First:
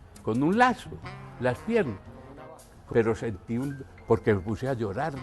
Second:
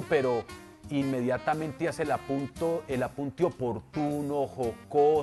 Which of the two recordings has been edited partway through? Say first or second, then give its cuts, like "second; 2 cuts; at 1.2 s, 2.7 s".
first; 1 cut; at 2.7 s